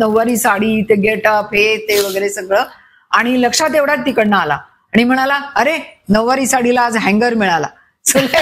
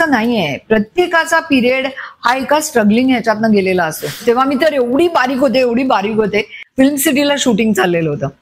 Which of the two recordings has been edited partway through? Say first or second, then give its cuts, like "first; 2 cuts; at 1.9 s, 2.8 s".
second; 2 cuts; at 4.2 s, 6.6 s